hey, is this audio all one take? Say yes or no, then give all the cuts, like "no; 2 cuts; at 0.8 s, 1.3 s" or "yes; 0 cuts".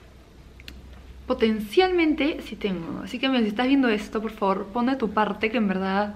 yes; 0 cuts